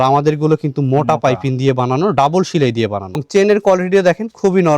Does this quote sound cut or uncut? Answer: cut